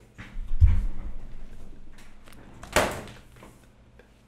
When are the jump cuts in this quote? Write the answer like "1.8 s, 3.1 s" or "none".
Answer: none